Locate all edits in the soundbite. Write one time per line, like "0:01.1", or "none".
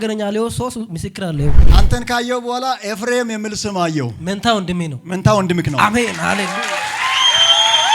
0:01.7